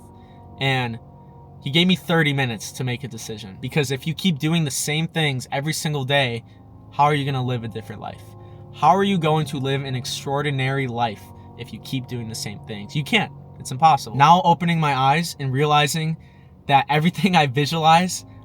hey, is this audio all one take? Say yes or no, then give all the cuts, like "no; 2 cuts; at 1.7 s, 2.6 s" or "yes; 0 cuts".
no; 2 cuts; at 3.5 s, 14.1 s